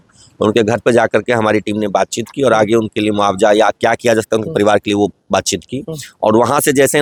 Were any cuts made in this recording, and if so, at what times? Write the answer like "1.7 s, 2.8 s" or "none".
none